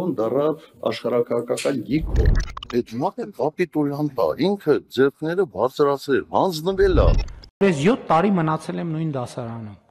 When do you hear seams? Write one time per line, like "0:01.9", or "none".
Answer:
none